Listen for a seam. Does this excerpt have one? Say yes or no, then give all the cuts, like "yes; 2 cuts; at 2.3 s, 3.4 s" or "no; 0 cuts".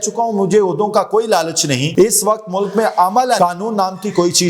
yes; 2 cuts; at 1.9 s, 3.4 s